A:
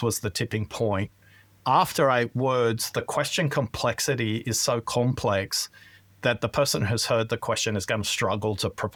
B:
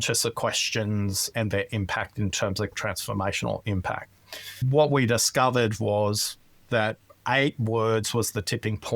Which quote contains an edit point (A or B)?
B